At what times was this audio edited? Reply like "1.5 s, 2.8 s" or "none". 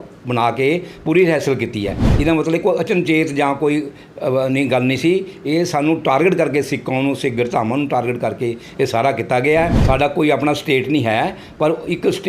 9.8 s